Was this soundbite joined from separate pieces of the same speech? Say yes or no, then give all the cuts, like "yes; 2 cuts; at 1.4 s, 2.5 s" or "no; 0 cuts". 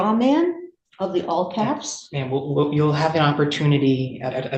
no; 0 cuts